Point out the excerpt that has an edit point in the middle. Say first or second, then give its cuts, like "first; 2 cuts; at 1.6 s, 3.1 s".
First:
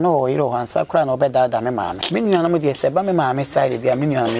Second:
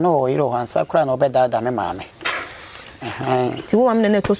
first; 1 cut; at 2.0 s